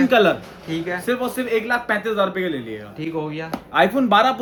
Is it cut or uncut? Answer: uncut